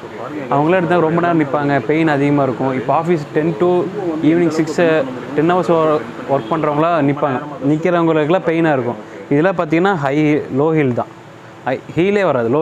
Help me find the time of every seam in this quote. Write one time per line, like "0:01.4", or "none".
none

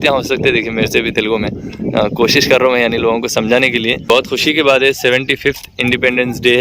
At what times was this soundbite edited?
0:04.0

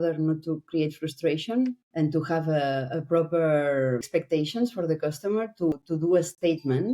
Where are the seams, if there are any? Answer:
0:01.8
0:04.0
0:05.7

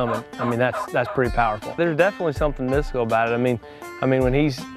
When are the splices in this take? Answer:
0:01.8

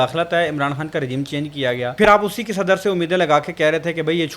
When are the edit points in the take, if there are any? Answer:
0:01.9

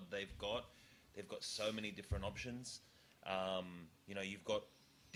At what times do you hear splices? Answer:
none

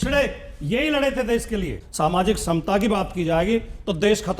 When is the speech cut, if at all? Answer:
0:01.8

